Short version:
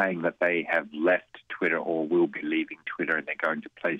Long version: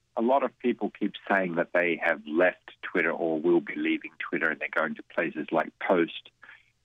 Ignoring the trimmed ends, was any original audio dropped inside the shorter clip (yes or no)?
no